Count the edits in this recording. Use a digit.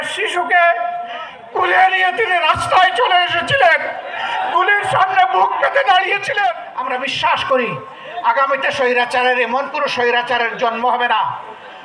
1